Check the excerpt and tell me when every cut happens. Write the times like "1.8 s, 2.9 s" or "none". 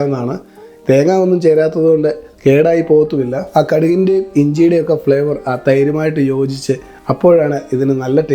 3.4 s

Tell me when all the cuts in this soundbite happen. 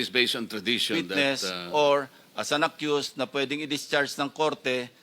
1.0 s

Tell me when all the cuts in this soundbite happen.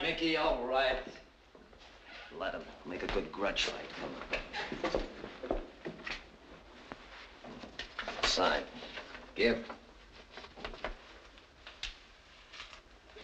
3.8 s

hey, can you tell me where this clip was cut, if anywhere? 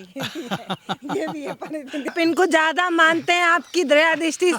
2.1 s

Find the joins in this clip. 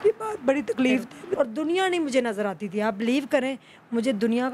1.2 s

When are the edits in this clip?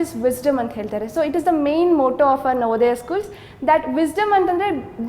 none

